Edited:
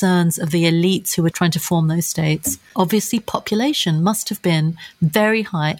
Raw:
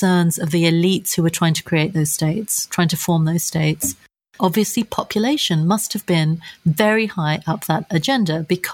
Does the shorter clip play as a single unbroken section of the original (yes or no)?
no